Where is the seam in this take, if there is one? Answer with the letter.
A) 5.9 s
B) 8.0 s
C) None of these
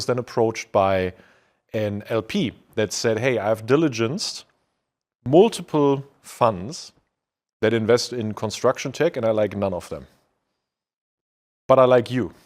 C